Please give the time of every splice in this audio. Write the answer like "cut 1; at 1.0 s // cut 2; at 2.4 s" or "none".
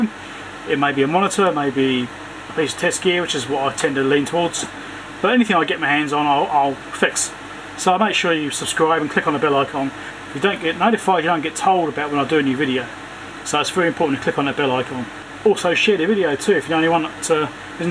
cut 1; at 10.1 s // cut 2; at 15.3 s